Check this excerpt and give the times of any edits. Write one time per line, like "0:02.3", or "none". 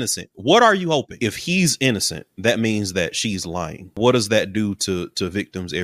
0:01.2
0:03.9